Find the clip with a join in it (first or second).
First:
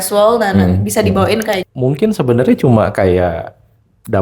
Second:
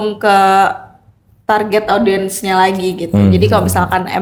first